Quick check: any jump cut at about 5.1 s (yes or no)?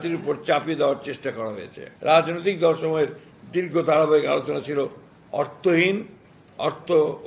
no